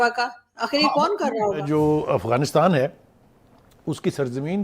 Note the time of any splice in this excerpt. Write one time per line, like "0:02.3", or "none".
0:01.6